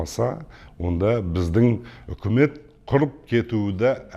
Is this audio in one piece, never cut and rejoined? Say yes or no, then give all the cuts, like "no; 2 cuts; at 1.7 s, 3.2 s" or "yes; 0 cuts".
yes; 0 cuts